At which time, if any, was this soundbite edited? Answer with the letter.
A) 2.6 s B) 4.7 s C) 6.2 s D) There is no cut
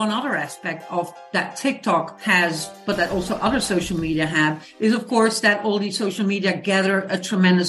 D